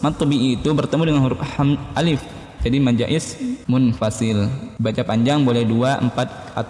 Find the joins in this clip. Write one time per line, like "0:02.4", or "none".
0:03.6
0:04.6